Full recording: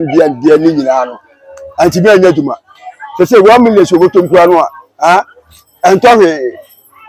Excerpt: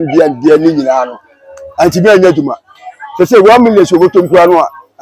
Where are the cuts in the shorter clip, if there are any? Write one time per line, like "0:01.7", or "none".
none